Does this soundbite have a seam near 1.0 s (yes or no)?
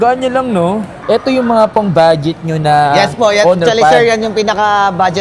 yes